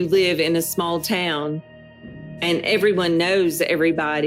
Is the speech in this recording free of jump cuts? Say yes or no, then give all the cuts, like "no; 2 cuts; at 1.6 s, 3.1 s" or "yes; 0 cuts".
no; 1 cut; at 2.0 s